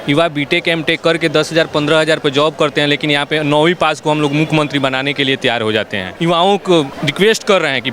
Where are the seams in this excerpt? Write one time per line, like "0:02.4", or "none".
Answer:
0:06.2
0:07.0